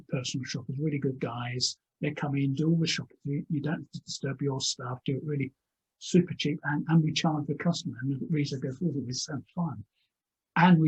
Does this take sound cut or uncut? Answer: uncut